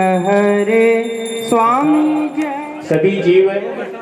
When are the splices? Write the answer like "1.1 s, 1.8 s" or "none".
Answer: 2.4 s